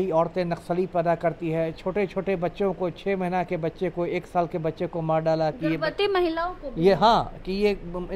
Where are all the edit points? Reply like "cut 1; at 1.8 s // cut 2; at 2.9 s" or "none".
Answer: none

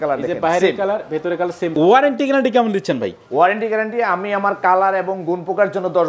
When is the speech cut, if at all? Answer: cut 1; at 1.8 s

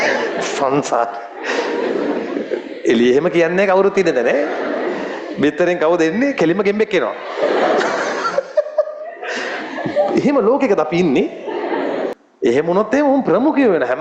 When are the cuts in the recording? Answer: cut 1; at 12.1 s

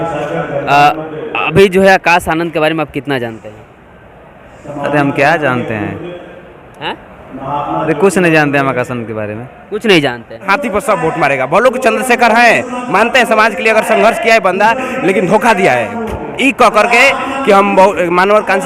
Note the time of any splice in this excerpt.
cut 1; at 10.5 s

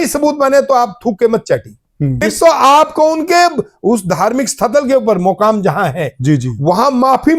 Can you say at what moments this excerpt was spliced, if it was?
cut 1; at 2.2 s

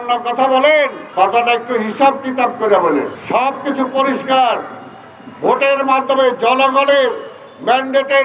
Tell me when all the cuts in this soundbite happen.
cut 1; at 1.0 s // cut 2; at 3.2 s

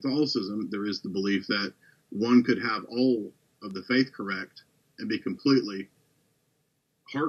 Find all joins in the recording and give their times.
none

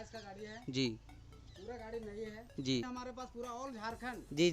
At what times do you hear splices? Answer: cut 1; at 2.8 s

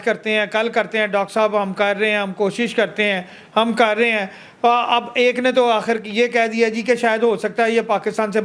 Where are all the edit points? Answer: none

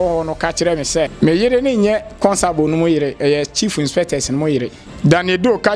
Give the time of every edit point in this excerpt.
cut 1; at 1.1 s // cut 2; at 4.8 s

